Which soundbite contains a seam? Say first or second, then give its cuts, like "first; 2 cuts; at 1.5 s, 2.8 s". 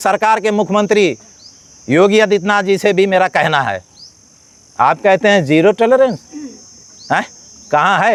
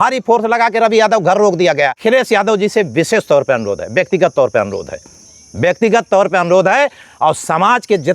second; 1 cut; at 2.0 s